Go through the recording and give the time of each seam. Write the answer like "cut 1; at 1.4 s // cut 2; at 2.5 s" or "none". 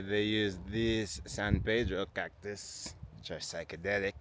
none